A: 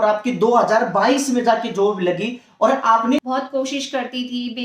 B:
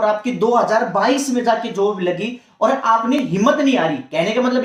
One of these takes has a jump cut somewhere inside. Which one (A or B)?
A